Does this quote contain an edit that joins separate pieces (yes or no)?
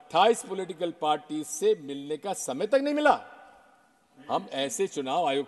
no